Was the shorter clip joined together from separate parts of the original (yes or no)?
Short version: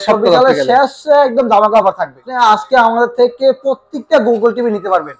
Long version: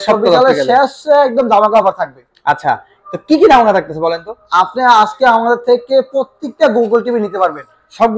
yes